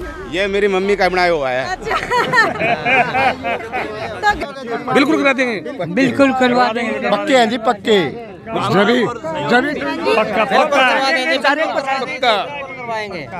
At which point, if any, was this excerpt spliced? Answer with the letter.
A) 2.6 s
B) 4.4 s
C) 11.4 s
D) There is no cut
B